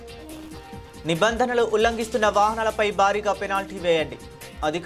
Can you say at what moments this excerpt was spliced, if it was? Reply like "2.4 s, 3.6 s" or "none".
1.0 s